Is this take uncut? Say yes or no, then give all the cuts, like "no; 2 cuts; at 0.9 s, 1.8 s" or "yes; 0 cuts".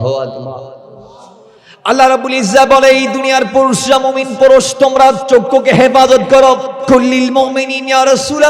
no; 1 cut; at 6.7 s